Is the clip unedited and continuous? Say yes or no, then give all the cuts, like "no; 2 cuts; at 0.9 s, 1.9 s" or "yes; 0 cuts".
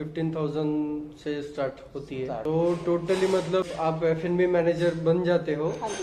no; 2 cuts; at 2.4 s, 3.7 s